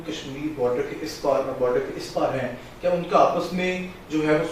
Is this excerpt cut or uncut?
uncut